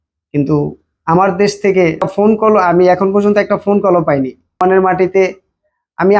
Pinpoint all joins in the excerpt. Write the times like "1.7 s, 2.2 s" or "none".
2.1 s, 4.6 s